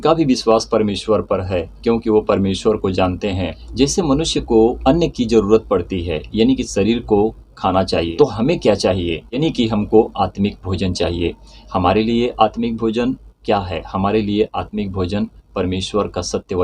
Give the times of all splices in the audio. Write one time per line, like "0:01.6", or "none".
0:03.6
0:04.8
0:08.1

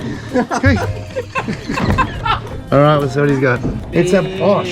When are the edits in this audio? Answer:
0:02.4
0:03.8

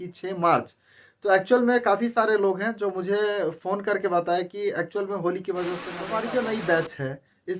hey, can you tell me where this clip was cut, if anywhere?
0:05.9

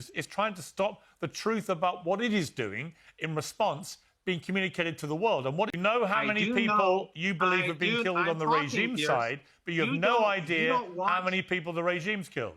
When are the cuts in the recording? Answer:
0:05.7

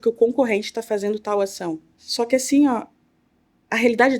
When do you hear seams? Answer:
0:01.9

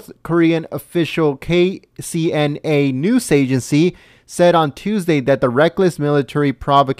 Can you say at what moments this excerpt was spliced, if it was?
none

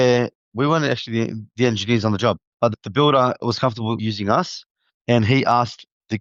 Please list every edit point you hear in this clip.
none

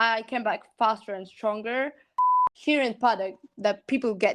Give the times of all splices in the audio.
0:02.3

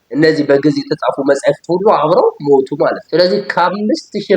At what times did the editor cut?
0:03.0

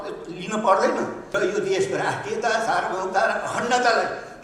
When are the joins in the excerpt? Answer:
0:01.2

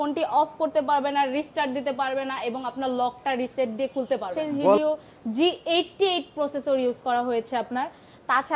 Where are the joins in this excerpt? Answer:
0:04.8

